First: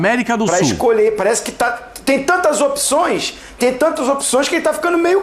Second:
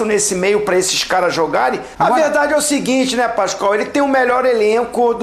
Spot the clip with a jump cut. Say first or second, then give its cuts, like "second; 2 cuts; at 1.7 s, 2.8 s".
second; 1 cut; at 1.9 s